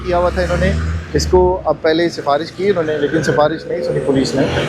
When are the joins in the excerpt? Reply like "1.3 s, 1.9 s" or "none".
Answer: none